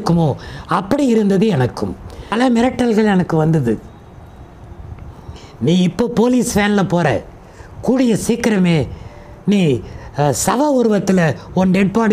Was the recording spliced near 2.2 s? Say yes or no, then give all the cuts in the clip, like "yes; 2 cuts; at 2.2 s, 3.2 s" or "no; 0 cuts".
yes; 1 cut; at 2.2 s